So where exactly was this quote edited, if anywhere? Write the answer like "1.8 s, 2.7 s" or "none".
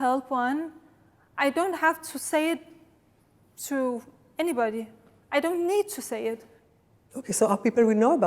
none